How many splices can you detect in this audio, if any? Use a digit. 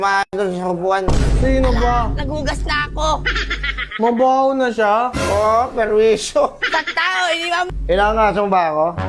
1